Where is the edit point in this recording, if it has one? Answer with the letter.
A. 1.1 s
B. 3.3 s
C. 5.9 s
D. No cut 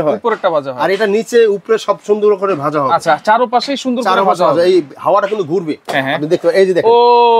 C